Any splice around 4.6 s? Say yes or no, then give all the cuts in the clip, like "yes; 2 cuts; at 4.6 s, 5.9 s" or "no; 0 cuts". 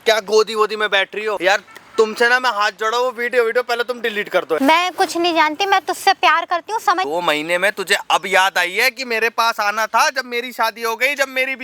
yes; 3 cuts; at 1.4 s, 4.6 s, 7.1 s